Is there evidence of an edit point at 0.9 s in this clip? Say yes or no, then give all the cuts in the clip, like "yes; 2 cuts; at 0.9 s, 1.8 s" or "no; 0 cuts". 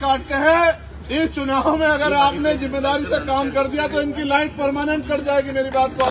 yes; 1 cut; at 0.9 s